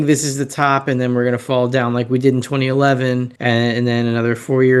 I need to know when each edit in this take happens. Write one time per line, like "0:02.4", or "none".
0:03.3